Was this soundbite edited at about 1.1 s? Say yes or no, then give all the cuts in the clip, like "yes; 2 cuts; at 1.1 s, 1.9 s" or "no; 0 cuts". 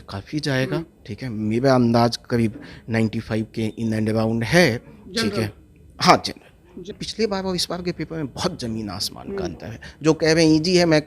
no; 1 cut; at 6.9 s